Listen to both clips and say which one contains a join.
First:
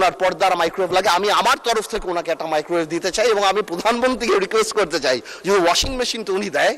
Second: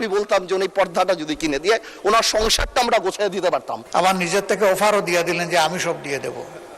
second; 1 cut; at 3.8 s

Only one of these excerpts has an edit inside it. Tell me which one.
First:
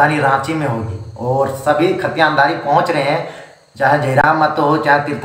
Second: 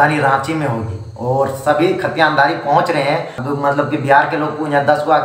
second; 1 cut; at 3.4 s

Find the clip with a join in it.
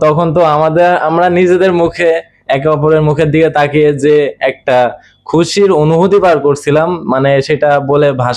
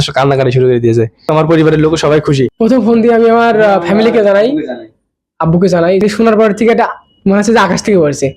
second; 3 cuts; at 1.3 s, 2.5 s, 6.0 s

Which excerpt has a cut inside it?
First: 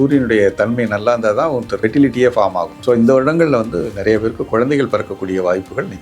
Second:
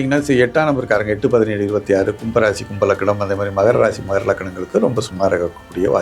first; 2 cuts; at 1.7 s, 2.7 s

